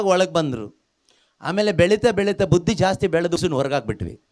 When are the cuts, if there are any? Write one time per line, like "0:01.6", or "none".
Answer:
0:03.4